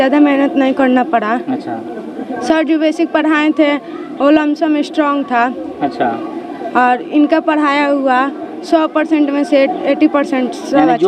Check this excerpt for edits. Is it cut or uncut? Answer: uncut